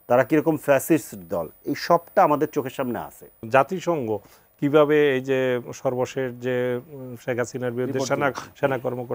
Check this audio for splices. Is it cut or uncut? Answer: cut